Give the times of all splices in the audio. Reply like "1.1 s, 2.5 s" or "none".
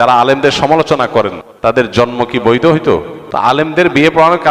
1.4 s, 3.2 s